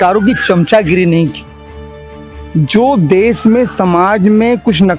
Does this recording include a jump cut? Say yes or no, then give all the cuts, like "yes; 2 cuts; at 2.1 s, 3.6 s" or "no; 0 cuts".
no; 0 cuts